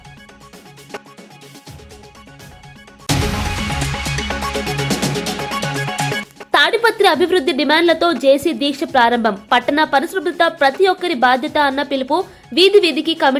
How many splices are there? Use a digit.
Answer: 0